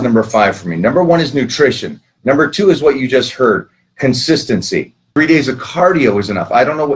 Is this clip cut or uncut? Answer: cut